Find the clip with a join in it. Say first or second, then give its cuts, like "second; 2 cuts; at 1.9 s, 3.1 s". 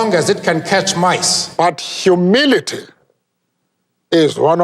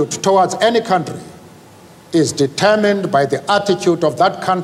first; 1 cut; at 1.4 s